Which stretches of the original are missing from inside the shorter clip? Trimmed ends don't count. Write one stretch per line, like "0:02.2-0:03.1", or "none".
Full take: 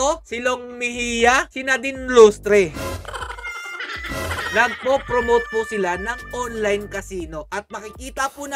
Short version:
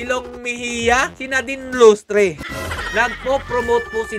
0:02.9-0:04.1